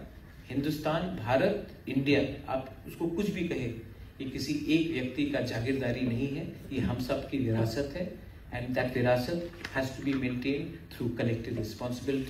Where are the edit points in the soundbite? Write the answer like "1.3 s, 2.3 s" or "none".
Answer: none